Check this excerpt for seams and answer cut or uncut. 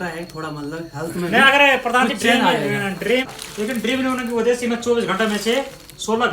cut